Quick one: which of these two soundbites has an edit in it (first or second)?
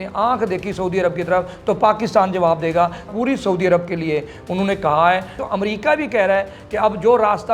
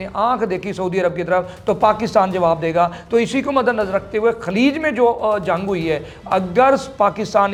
first